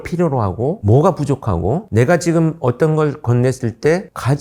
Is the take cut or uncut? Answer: uncut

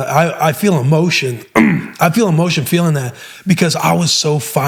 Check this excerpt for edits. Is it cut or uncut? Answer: uncut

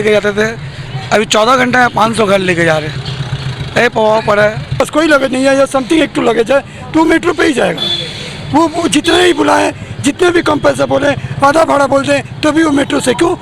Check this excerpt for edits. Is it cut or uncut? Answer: cut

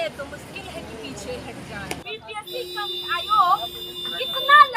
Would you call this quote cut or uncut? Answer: cut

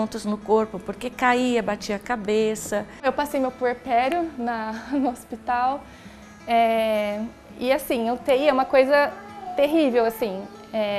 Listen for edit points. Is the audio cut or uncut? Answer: cut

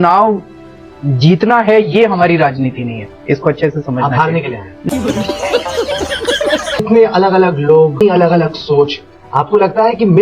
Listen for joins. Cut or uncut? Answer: cut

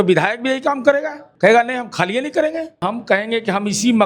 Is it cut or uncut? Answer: cut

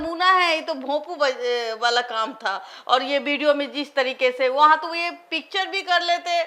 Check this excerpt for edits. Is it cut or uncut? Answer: uncut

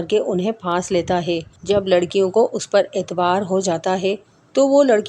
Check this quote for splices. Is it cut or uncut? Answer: cut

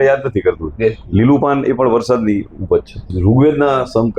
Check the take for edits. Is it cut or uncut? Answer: cut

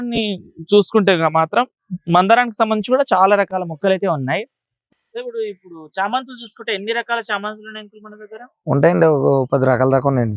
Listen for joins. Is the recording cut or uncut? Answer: cut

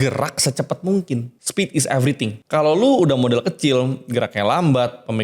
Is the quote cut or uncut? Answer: cut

